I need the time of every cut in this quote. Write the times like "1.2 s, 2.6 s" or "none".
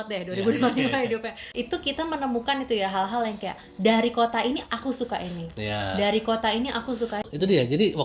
1.4 s, 7.2 s